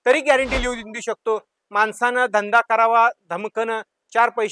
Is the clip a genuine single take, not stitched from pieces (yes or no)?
yes